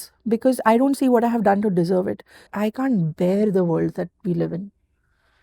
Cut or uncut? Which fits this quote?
cut